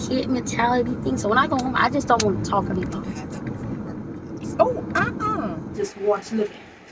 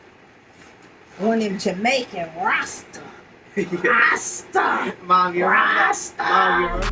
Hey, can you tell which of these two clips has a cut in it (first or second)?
first